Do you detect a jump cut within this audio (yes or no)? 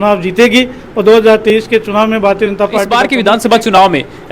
yes